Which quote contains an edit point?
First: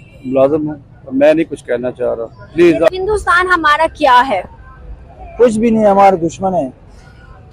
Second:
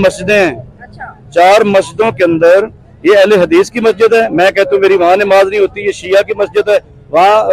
first; 1 cut; at 2.9 s

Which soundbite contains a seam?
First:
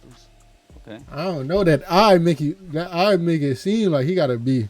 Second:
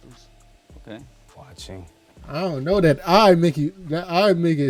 first; 1 cut; at 1.1 s

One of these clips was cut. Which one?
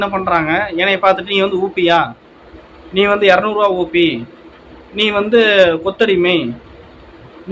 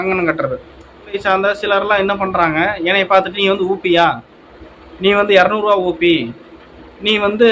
second; 1 cut; at 1.2 s

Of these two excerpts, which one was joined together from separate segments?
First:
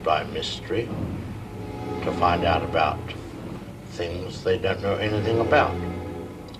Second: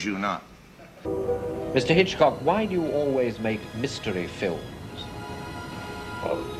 second; 1 cut; at 1.1 s

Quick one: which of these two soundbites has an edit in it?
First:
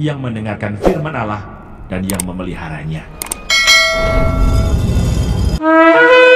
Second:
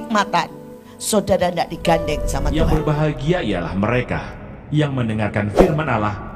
second; 1 cut; at 2.6 s

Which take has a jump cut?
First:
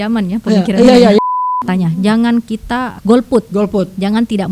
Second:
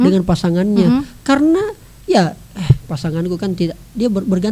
first; 2 cuts; at 1.4 s, 2.9 s

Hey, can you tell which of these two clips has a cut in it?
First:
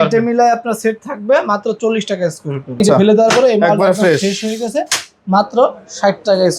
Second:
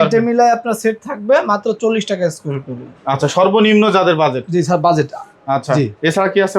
first; 1 cut; at 2.8 s

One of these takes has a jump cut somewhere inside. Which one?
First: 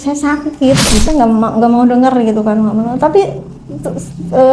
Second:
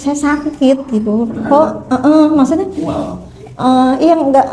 first; 1 cut; at 1.0 s

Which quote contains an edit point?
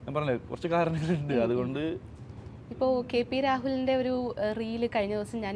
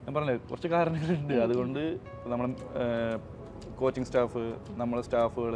second; 1 cut; at 2.1 s

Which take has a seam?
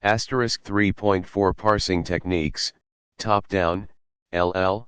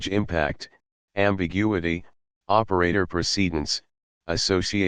first; 1 cut; at 0.9 s

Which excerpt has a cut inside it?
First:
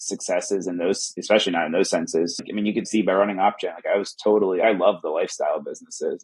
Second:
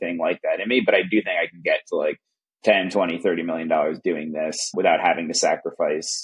first; 3 cuts; at 1.1 s, 2.4 s, 4.6 s

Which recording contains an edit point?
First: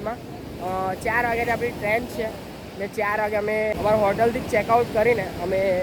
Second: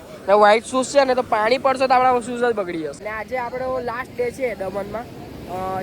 second; 1 cut; at 3.0 s

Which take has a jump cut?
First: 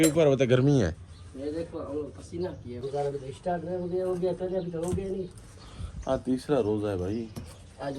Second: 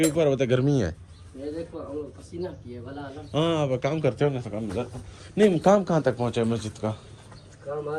first; 2 cuts; at 2.7 s, 5.8 s

